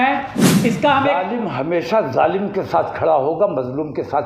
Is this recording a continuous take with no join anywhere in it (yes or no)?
no